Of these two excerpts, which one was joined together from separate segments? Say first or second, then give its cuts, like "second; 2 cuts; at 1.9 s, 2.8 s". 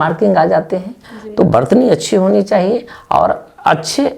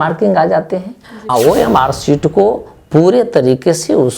second; 1 cut; at 1.3 s